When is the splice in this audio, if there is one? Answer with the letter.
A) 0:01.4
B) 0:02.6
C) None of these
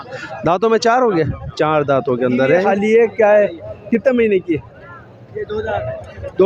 B